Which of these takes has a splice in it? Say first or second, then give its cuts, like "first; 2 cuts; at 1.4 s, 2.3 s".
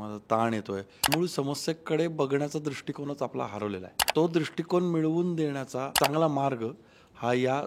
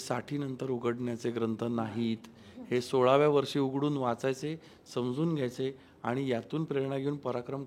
first; 3 cuts; at 1.1 s, 4.0 s, 5.9 s